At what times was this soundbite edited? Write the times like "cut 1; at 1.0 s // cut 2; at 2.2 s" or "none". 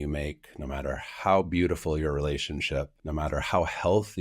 cut 1; at 3.0 s